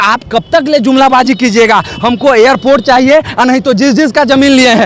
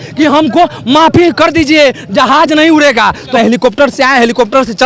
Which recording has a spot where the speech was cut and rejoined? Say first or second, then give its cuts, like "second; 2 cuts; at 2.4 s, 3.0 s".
second; 1 cut; at 3.4 s